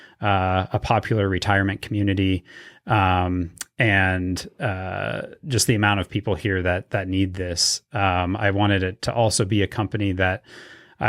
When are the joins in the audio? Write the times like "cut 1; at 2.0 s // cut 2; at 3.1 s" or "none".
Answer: none